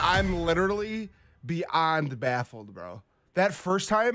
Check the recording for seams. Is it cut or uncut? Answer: uncut